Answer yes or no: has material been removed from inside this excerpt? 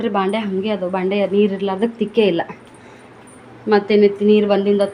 no